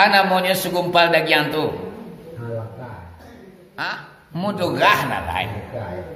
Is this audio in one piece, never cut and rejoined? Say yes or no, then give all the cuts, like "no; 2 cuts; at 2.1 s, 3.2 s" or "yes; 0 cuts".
no; 1 cut; at 4.1 s